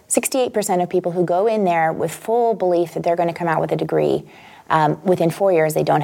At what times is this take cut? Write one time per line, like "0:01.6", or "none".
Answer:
none